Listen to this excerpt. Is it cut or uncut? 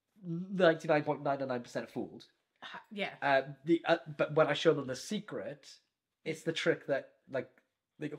uncut